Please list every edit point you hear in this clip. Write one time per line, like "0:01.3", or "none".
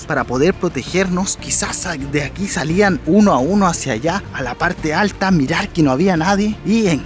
0:01.4
0:04.2